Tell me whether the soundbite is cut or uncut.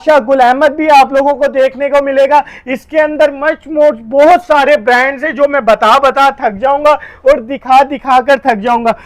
uncut